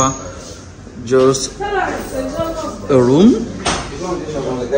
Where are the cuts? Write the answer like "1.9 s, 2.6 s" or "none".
none